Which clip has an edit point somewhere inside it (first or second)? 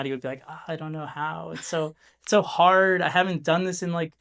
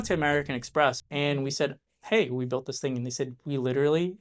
second